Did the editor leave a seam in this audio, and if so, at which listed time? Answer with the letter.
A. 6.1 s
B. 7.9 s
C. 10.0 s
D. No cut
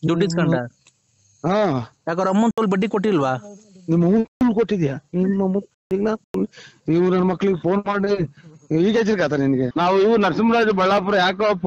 C